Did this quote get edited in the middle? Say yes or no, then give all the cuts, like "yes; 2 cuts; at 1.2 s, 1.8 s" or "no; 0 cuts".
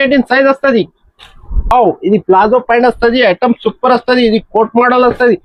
no; 0 cuts